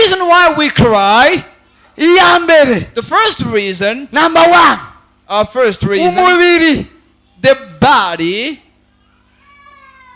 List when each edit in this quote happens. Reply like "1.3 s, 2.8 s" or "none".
1.8 s